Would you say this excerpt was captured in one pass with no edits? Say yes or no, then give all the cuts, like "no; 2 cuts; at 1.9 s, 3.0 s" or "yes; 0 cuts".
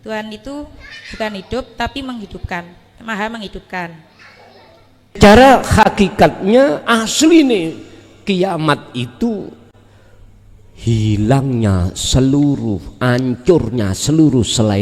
no; 1 cut; at 5.2 s